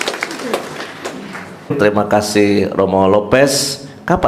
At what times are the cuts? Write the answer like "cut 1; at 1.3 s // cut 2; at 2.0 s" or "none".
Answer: cut 1; at 1.7 s